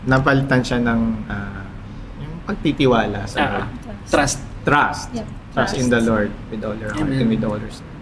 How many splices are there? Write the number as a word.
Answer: zero